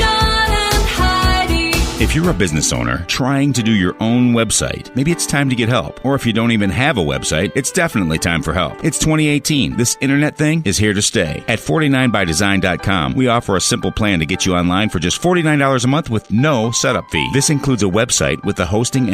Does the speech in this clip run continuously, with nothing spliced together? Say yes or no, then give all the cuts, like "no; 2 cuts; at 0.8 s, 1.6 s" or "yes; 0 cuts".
no; 1 cut; at 1.9 s